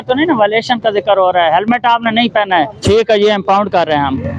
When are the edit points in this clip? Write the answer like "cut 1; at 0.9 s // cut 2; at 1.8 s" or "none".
cut 1; at 2.8 s